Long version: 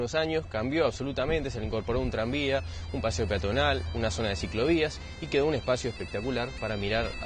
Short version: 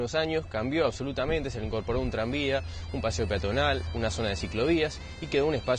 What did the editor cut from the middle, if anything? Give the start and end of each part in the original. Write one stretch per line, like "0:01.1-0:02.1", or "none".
none

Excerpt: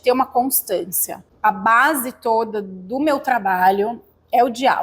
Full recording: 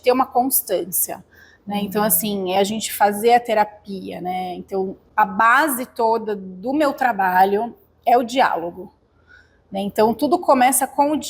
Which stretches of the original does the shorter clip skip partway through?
0:01.3-0:05.0

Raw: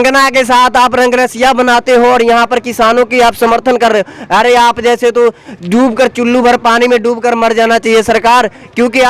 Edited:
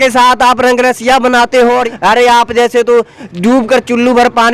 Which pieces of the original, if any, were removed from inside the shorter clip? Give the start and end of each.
0:02.2-0:04.1

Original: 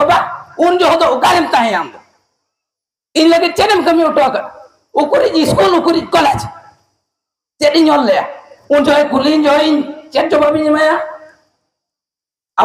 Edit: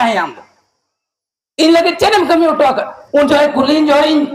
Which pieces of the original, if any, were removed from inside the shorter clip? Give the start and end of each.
0:04.5-0:08.5

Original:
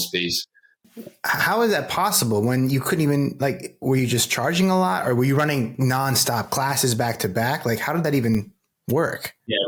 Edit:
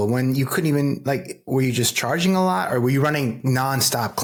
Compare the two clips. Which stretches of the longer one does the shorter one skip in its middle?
none

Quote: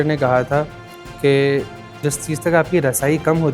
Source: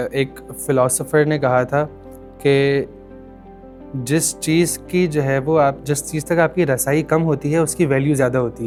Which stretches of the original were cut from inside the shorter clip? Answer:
0:03.2-0:05.8

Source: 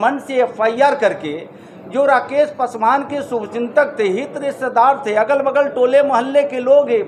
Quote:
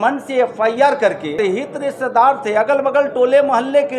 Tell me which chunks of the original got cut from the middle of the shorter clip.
0:01.3-0:03.9

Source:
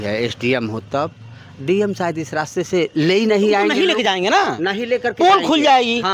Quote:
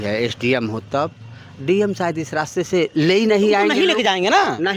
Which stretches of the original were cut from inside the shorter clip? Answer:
none

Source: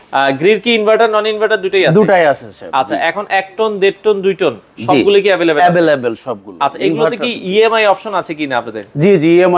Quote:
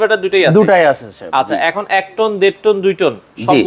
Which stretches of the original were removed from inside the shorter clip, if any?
none

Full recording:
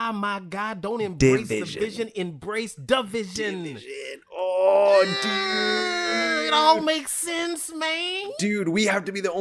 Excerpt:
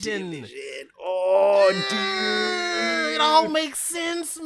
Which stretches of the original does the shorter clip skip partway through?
none

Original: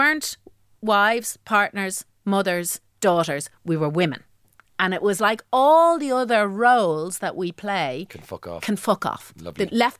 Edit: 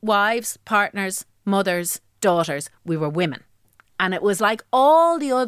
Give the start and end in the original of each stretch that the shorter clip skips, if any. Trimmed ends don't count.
none

